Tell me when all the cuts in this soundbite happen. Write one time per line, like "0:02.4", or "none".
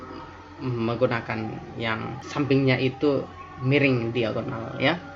0:02.2